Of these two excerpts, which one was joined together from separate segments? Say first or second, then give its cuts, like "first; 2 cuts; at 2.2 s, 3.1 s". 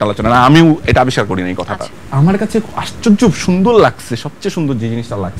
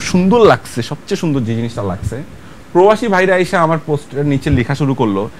first; 1 cut; at 1.9 s